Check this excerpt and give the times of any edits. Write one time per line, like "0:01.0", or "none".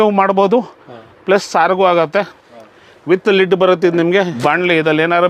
0:04.3